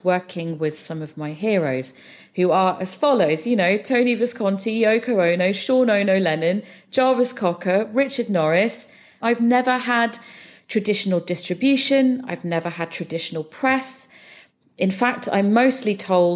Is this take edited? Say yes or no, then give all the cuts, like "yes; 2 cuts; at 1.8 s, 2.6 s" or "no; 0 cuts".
yes; 1 cut; at 9.2 s